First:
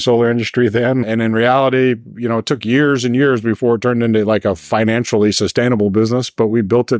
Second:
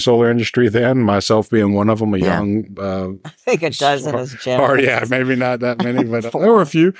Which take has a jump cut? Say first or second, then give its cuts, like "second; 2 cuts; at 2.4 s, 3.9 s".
first; 1 cut; at 1.0 s